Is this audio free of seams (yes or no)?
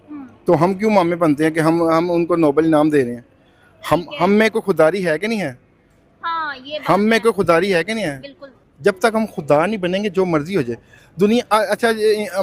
yes